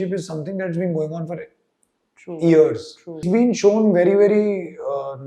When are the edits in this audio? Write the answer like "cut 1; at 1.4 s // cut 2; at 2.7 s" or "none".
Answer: cut 1; at 3.2 s